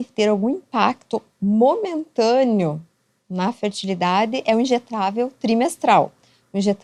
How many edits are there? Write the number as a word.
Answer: zero